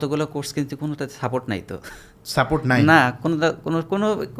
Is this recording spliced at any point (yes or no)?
no